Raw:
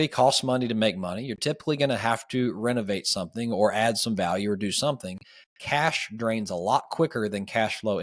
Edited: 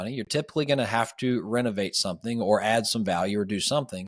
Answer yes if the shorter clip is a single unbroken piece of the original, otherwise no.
yes